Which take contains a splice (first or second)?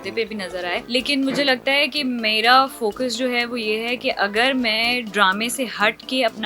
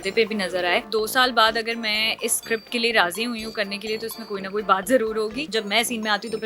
second